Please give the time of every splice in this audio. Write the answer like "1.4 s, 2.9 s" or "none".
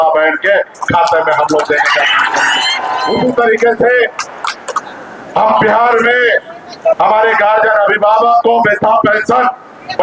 2.9 s